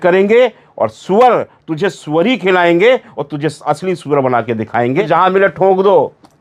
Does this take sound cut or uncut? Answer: cut